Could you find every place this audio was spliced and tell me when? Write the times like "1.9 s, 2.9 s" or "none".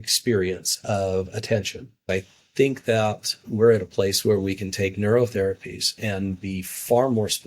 2.1 s